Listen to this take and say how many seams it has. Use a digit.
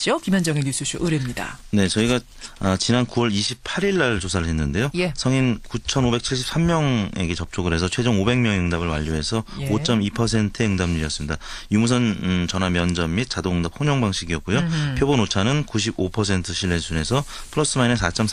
0